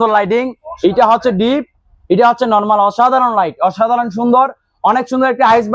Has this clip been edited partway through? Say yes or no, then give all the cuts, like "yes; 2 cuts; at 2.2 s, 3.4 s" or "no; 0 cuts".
no; 0 cuts